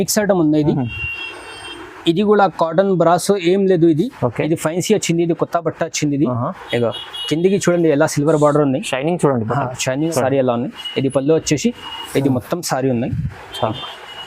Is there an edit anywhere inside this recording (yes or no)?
yes